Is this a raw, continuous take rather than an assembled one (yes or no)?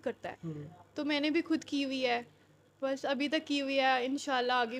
yes